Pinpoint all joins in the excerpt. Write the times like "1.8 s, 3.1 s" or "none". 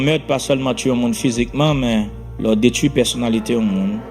2.2 s